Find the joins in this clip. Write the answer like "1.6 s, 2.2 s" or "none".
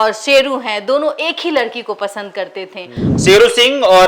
3.0 s